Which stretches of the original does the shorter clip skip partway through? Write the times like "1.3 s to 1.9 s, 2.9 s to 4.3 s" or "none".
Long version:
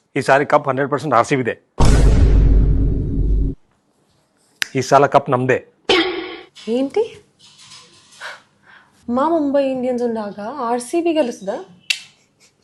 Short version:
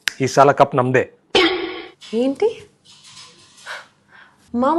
none